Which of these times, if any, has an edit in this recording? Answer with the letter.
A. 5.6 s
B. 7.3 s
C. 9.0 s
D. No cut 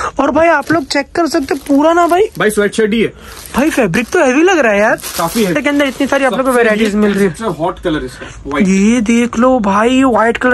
A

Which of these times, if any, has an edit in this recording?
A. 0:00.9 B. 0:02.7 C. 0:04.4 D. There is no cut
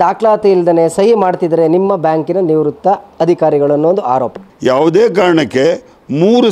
C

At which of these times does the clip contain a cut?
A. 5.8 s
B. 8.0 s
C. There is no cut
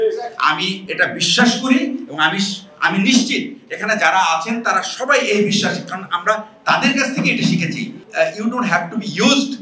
B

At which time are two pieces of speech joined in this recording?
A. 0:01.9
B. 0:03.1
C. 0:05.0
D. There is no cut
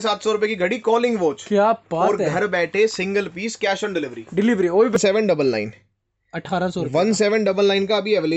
C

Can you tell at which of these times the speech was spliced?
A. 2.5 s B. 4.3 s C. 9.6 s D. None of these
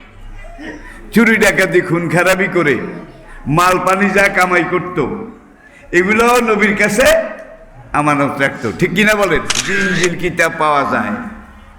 C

